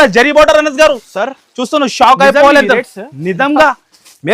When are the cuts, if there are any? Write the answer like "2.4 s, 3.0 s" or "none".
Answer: none